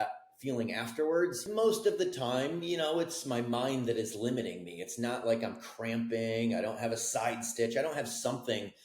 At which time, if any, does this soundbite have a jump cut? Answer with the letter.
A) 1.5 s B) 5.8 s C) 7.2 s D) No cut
A